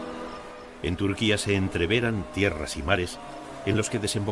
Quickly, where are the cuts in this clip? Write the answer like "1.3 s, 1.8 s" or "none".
1.4 s